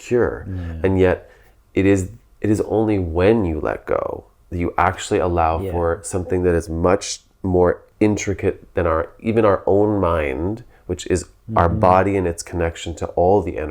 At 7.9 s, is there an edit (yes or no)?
yes